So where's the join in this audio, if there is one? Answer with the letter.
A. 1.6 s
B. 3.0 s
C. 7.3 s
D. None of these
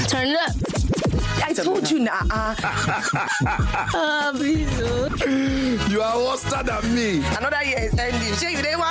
D